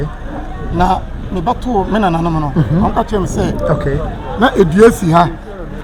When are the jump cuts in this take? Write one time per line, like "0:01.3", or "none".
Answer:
none